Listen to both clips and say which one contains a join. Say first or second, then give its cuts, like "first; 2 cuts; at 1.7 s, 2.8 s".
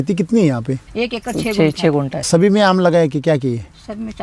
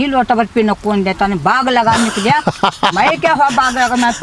first; 2 cuts; at 0.9 s, 2.2 s